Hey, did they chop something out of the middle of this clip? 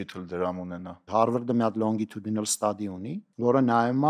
yes; 2 cuts; at 1.0 s, 3.2 s

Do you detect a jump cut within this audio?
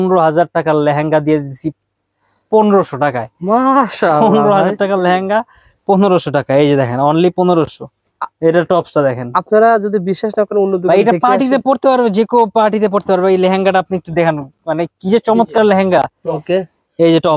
no; 0 cuts

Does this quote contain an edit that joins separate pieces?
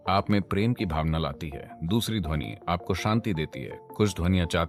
no; 0 cuts

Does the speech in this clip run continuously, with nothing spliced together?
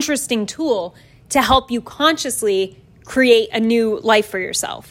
yes; 0 cuts

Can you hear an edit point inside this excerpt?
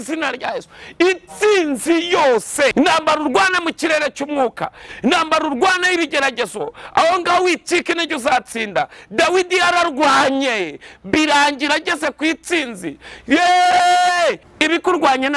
yes; 2 cuts; at 2.7 s, 14.5 s

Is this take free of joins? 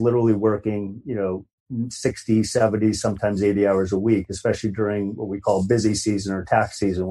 no; 1 cut; at 1.6 s

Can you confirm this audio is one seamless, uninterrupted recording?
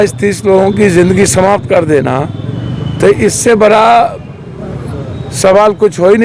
yes; 0 cuts

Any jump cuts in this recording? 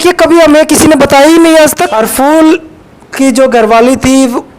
yes; 1 cut; at 1.9 s

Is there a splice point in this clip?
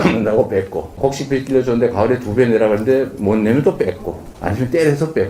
yes; 1 cut; at 1.0 s

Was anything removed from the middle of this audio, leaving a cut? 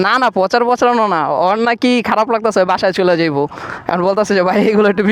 no; 0 cuts

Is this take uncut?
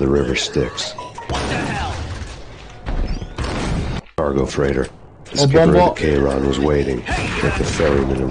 yes; 0 cuts

